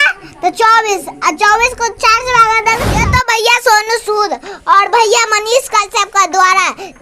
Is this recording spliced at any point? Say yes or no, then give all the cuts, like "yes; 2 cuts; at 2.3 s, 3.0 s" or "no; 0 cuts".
yes; 1 cut; at 3.0 s